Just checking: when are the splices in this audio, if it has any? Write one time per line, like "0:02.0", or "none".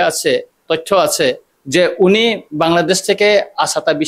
0:01.5

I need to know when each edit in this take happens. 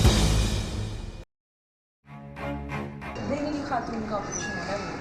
0:02.0

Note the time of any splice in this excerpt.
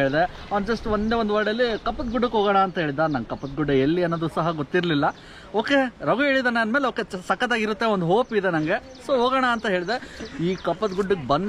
none

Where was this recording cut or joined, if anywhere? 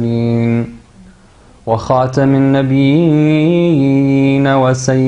0:01.9

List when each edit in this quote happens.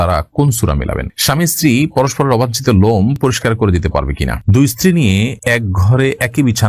0:01.1
0:04.4

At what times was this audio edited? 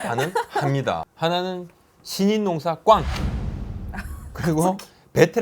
0:01.1

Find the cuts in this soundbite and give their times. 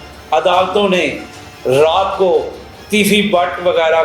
none

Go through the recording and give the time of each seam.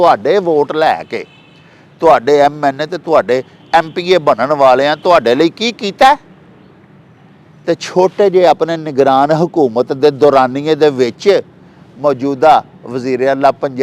none

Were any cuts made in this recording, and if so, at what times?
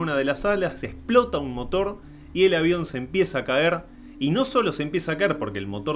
none

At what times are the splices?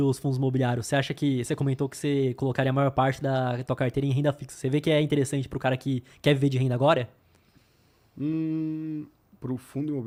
none

